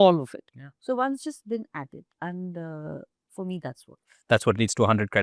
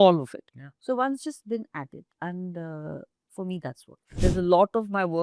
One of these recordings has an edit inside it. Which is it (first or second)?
second